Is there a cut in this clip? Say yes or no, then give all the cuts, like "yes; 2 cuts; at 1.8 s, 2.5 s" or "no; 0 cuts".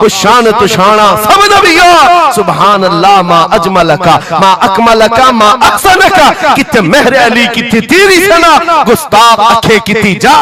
no; 0 cuts